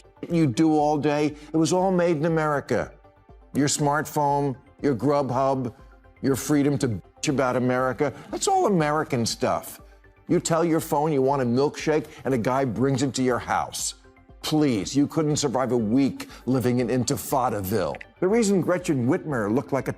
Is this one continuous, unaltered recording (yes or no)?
no